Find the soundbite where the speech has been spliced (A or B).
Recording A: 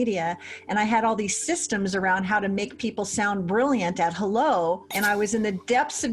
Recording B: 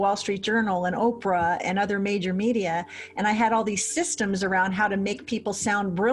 A